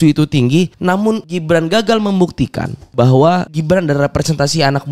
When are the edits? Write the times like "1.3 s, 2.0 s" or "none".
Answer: 1.1 s, 2.8 s, 3.5 s